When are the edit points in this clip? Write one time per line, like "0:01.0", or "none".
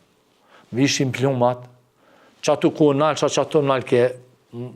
none